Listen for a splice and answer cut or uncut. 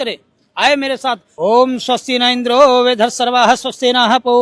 cut